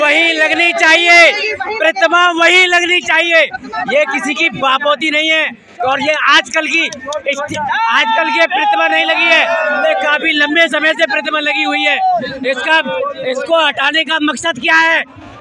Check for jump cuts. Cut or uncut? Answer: uncut